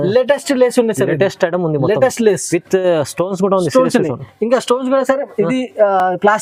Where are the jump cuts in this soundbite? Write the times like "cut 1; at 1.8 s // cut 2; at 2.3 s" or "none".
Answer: none